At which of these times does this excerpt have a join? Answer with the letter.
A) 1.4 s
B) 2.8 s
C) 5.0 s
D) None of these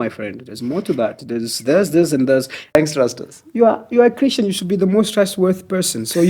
B